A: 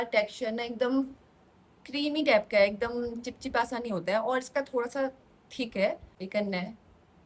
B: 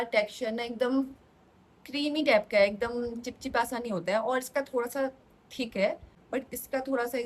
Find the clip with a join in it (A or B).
A